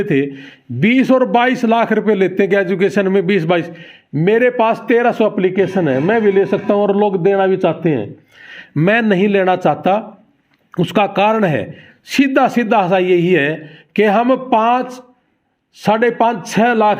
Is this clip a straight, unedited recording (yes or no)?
yes